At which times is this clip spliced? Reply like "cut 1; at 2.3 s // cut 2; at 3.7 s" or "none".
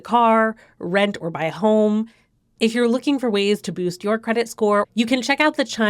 cut 1; at 4.9 s